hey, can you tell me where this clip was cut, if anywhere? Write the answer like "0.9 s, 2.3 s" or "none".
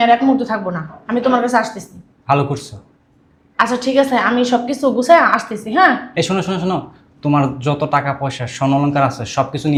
none

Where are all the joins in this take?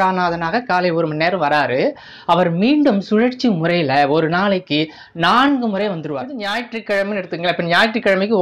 6.5 s

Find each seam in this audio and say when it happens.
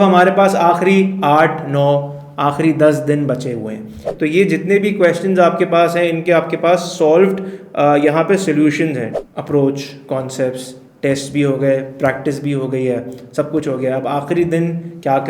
4.0 s, 9.1 s

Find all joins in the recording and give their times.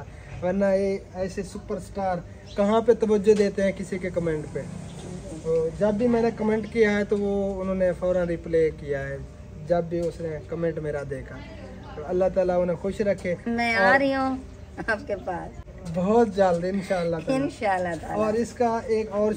none

